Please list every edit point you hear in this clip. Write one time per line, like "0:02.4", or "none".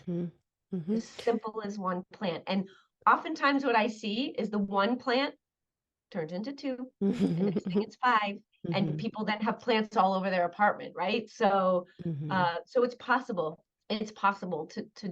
0:13.7